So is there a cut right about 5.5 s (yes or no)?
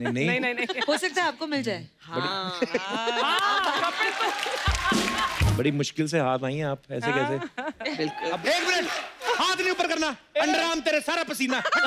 yes